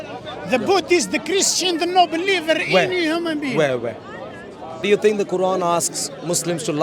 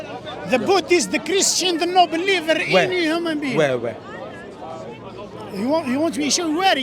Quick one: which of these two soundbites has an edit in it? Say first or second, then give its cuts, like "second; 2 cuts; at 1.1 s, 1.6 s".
first; 1 cut; at 4.8 s